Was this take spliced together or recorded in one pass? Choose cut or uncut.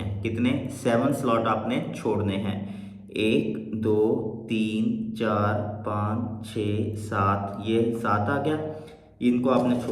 uncut